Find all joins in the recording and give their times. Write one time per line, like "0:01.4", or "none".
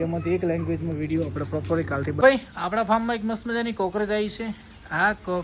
0:02.2